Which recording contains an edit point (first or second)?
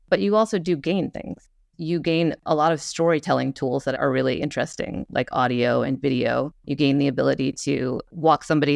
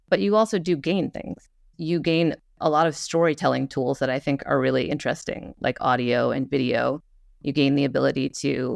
first